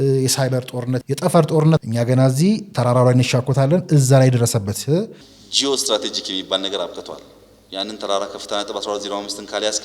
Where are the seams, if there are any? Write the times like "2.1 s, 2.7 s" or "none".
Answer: 1.0 s, 1.8 s, 5.2 s